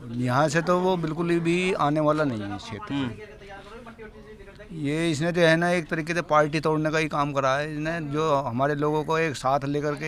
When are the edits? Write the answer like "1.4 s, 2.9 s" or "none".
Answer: none